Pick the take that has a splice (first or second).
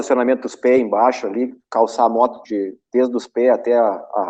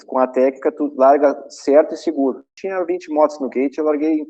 second